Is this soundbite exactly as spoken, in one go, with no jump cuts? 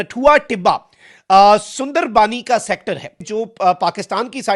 no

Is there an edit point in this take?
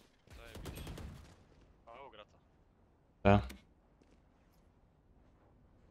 no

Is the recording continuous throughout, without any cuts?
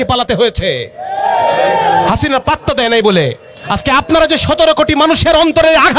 yes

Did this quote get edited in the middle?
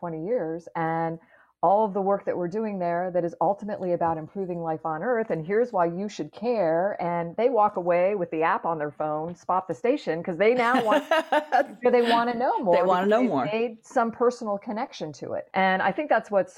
yes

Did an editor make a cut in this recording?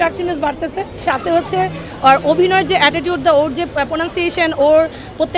no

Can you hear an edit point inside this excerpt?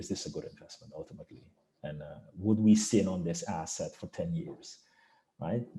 no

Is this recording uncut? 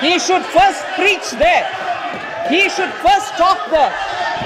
yes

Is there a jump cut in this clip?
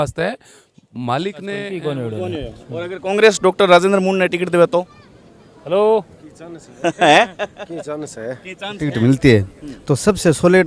yes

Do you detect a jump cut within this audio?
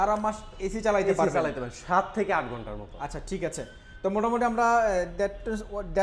no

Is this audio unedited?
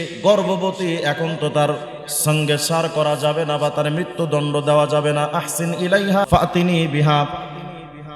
no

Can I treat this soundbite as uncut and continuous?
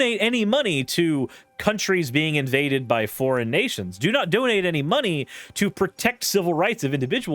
yes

